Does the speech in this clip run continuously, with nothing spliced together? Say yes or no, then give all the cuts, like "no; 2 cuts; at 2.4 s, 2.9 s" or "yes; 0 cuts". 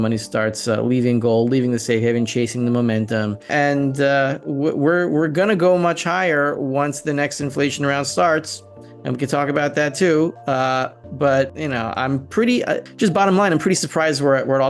no; 3 cuts; at 3.5 s, 11.6 s, 12.9 s